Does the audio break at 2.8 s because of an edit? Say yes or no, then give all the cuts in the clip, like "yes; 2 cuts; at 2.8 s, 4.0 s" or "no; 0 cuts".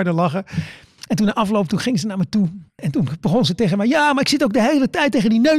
yes; 1 cut; at 2.8 s